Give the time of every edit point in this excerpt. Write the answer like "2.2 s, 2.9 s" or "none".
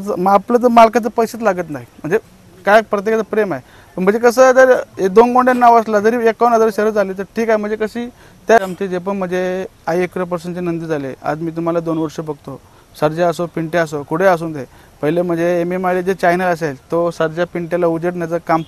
8.6 s